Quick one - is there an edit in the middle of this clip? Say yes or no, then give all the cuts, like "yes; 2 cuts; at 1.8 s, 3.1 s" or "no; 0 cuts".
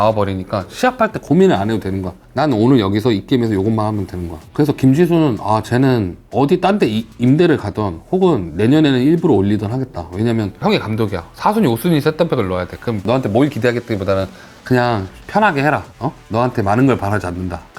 yes; 4 cuts; at 1.2 s, 6.2 s, 10.6 s, 13.0 s